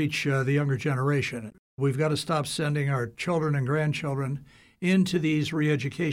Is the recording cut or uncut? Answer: cut